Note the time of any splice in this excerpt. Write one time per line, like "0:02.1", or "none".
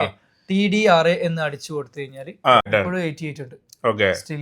0:02.7

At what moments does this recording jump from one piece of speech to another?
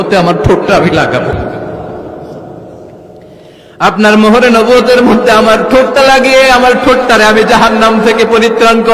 0:01.3

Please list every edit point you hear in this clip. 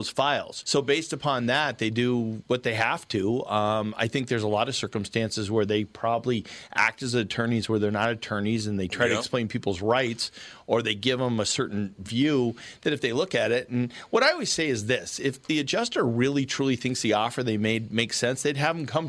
none

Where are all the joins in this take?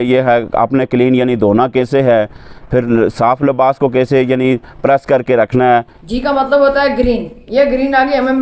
0:05.9

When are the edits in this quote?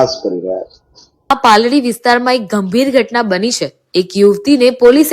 0:01.3

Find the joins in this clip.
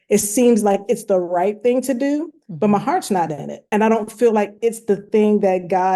0:03.7

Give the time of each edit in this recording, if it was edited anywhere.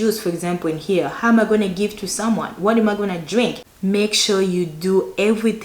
0:03.7

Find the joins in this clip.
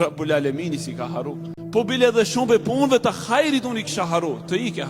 0:01.5

